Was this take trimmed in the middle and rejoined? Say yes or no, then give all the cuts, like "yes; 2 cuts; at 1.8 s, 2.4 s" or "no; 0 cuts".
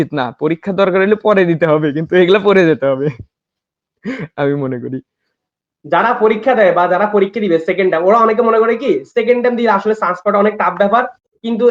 no; 0 cuts